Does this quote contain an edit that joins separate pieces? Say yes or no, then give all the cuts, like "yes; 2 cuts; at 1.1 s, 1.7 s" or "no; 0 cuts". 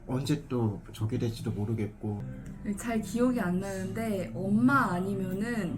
yes; 1 cut; at 2.3 s